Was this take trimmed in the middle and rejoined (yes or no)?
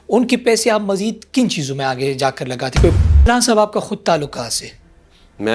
yes